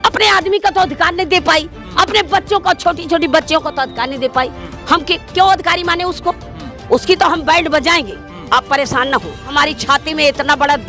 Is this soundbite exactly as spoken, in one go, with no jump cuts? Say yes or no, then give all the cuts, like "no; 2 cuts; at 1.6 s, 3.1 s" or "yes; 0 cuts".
no; 2 cuts; at 4.6 s, 9.5 s